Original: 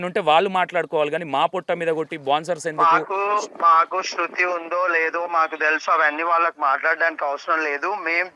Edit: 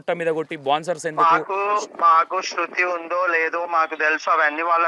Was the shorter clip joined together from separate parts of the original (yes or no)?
no